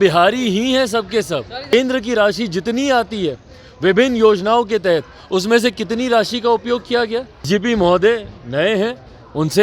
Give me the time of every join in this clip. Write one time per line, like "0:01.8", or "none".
0:01.7
0:07.5

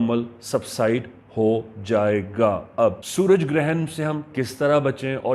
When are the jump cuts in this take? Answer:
0:03.0

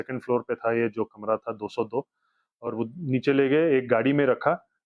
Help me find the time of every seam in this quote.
none

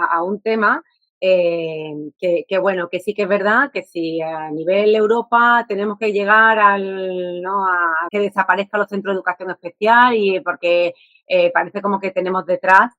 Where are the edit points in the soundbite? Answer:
none

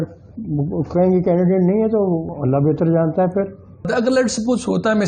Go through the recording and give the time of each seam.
0:02.3
0:03.9

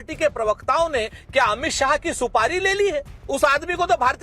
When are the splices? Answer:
0:03.2

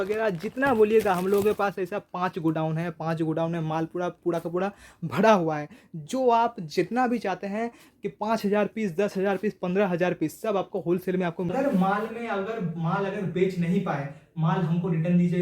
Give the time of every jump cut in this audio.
0:11.5

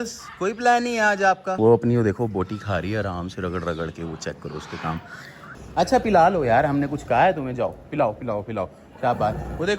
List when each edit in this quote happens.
0:05.5

